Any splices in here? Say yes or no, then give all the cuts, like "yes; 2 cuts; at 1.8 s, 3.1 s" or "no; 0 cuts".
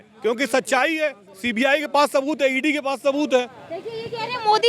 no; 0 cuts